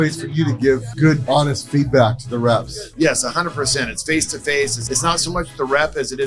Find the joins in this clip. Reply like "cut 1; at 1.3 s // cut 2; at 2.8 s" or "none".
cut 1; at 1.1 s // cut 2; at 2.8 s // cut 3; at 4.8 s